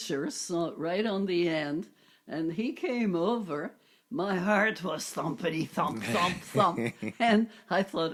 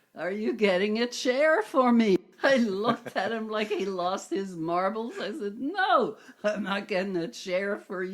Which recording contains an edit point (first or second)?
second